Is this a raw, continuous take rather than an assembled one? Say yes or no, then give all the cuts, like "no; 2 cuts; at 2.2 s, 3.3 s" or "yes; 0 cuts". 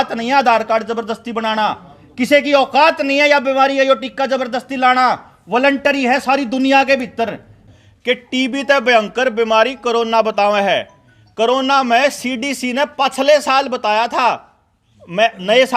no; 1 cut; at 7.7 s